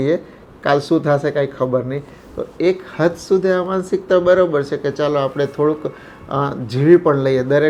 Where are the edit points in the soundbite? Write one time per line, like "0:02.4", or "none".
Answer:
none